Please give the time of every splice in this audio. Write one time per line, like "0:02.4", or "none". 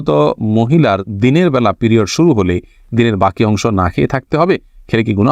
none